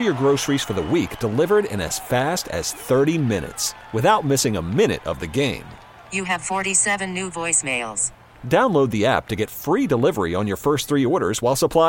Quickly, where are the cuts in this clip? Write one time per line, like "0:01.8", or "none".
none